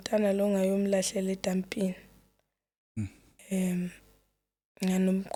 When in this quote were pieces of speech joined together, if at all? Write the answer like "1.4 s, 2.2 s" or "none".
none